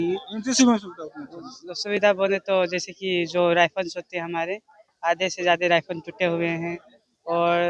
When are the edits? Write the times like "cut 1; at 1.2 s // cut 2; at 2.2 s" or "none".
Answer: none